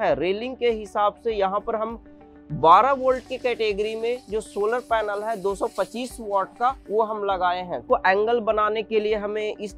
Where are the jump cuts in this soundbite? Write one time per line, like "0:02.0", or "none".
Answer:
0:07.8